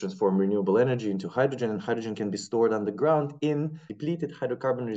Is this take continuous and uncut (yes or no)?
no